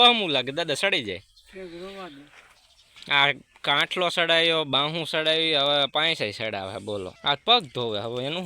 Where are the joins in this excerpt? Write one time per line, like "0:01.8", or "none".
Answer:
0:07.1